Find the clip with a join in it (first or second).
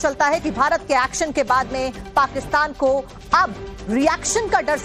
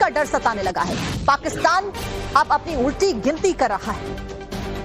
second